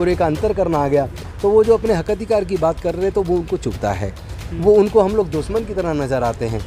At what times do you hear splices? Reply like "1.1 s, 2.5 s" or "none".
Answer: none